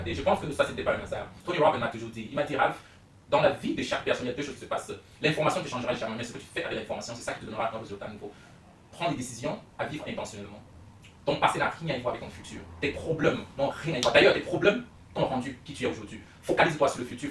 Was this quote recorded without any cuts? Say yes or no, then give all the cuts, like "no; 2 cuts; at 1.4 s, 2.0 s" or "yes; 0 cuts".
no; 1 cut; at 1.3 s